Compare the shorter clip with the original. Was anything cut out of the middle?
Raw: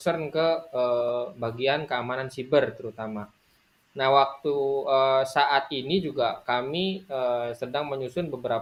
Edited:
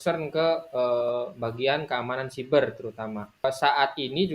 yes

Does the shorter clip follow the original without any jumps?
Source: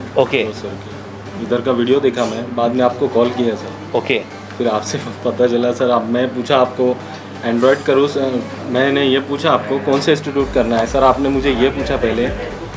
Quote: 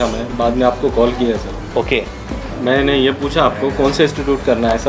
no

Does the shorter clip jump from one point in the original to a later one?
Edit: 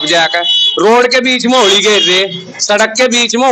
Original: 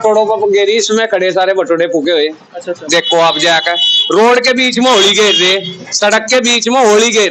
no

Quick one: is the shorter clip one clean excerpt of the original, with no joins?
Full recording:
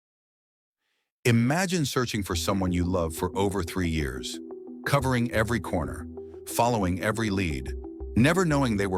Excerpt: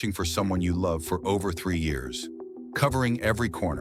yes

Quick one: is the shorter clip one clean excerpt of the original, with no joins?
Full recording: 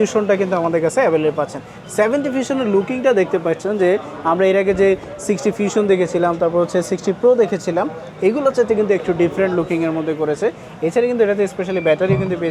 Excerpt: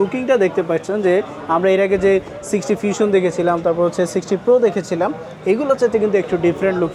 yes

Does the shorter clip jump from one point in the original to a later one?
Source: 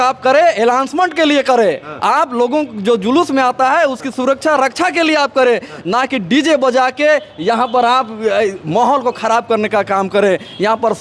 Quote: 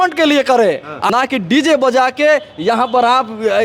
yes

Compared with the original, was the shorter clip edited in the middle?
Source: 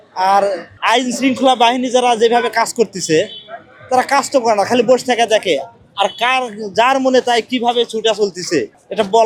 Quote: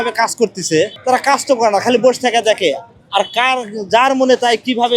yes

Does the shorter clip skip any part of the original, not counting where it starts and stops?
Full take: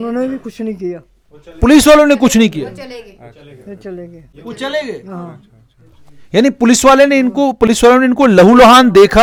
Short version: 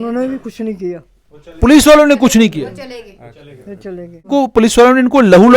yes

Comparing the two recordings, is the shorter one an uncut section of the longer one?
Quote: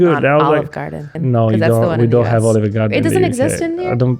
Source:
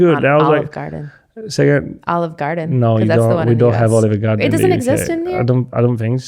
no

